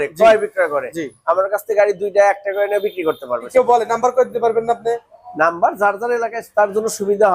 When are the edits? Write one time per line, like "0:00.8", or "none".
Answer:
0:03.3